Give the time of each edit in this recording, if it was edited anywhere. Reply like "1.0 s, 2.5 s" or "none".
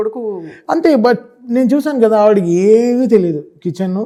none